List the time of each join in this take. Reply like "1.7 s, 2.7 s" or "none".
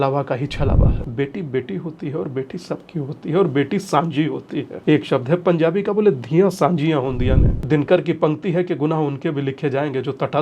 1.0 s, 4.7 s, 7.5 s